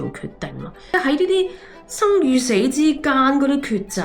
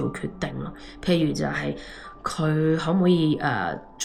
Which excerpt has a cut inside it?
first; 1 cut; at 0.9 s

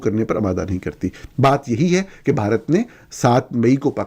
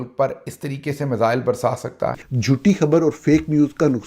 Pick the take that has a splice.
second; 1 cut; at 2.3 s

